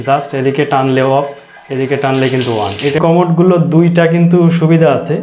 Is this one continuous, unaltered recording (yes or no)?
no